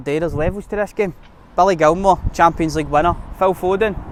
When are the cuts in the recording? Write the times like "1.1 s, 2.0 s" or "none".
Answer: none

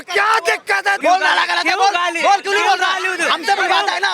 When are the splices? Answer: 1.0 s

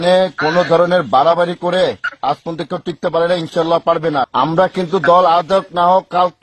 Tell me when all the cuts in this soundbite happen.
4.3 s

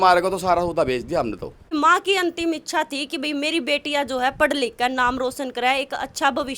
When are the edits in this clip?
1.7 s

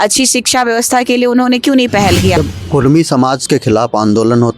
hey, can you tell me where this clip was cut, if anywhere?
2.3 s

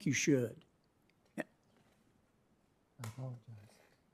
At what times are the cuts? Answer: none

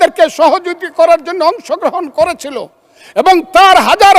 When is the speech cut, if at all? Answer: none

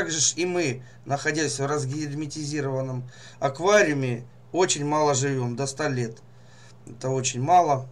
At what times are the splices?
none

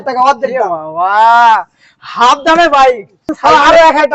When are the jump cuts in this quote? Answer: 3.2 s

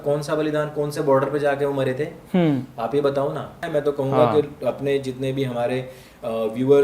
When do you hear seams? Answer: 3.6 s

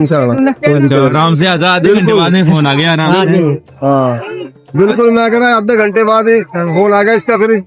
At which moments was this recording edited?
none

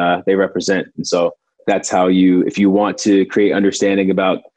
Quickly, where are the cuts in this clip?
1.6 s

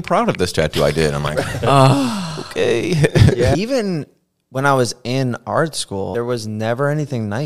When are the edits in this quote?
3.5 s, 6.1 s

